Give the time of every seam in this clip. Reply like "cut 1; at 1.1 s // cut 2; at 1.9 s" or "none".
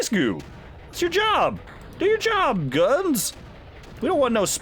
none